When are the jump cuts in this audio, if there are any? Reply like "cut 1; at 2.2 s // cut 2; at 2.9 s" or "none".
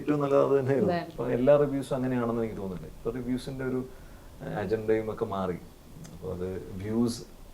cut 1; at 1.1 s